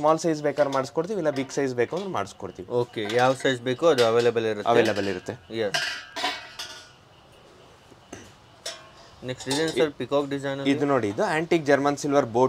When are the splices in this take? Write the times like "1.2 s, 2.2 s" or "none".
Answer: none